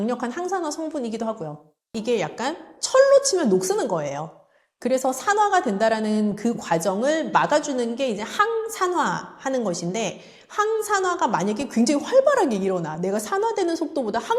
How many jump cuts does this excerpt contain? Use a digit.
1